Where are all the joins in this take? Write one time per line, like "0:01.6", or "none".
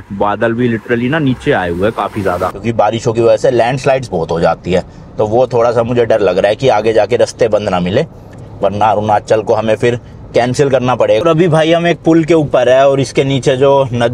0:02.5
0:11.2